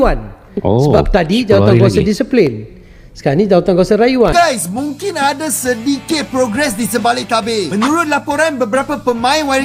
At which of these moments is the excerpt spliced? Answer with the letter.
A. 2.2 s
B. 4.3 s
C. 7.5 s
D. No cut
B